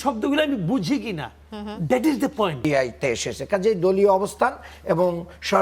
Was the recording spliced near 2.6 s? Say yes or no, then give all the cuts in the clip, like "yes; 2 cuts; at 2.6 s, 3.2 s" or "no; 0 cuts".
yes; 1 cut; at 2.6 s